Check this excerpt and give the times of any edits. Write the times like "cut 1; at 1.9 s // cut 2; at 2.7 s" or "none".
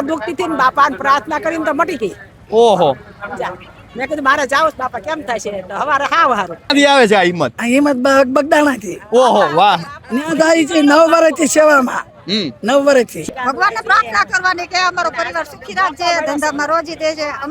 cut 1; at 6.7 s // cut 2; at 13.2 s